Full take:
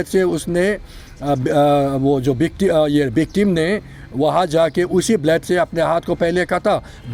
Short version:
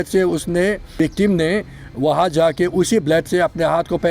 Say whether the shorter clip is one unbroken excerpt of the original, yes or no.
no